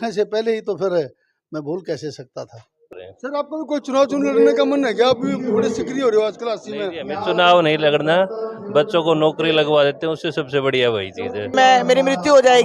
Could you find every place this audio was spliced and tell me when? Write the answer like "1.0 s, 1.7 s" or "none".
2.9 s, 11.5 s